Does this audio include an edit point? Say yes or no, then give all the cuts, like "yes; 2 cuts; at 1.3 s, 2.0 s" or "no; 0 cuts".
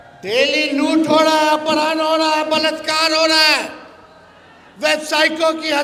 no; 0 cuts